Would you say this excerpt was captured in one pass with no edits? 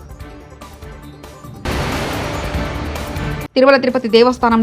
no; 2 cuts; at 1.5 s, 3.2 s

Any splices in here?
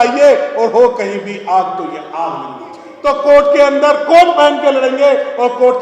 yes; 1 cut; at 2.8 s

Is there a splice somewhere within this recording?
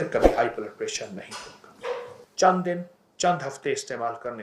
yes; 1 cut; at 2.2 s

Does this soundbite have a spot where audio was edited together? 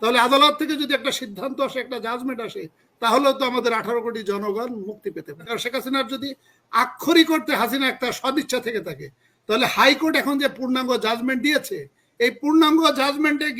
yes; 1 cut; at 5.5 s

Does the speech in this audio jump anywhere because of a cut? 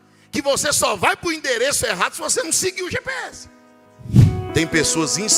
yes; 1 cut; at 4.3 s

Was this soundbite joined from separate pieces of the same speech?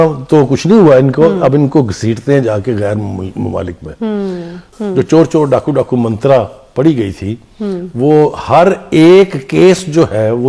yes; 1 cut; at 4.6 s

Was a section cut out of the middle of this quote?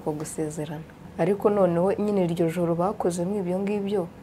yes; 1 cut; at 1.0 s

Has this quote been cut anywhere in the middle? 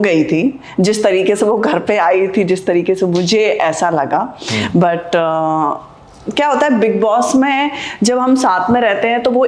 no; 0 cuts

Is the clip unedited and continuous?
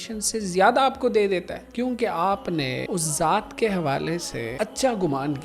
no; 3 cuts; at 1.6 s, 2.8 s, 4.5 s

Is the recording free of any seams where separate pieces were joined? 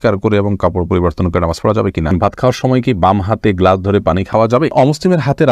no; 2 cuts; at 2.1 s, 4.4 s

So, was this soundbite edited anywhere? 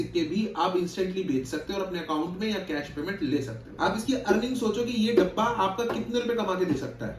yes; 1 cut; at 3.6 s

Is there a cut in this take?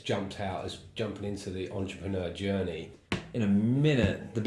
yes; 1 cut; at 2.9 s

